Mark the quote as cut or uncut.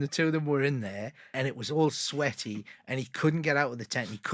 cut